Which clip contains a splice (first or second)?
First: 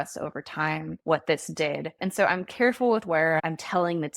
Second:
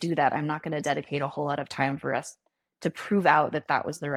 first